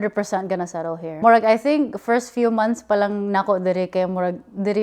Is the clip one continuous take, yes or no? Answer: no